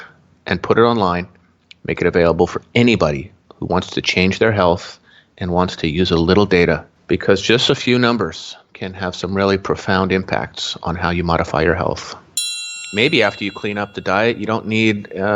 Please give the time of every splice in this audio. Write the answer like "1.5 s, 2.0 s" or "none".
6.9 s, 12.4 s